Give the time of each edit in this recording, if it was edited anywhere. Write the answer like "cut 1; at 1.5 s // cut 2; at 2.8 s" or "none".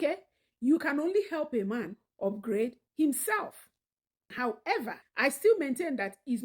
cut 1; at 4.3 s